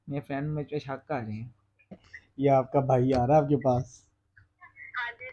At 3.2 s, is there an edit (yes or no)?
no